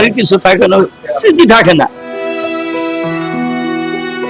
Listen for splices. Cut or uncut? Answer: cut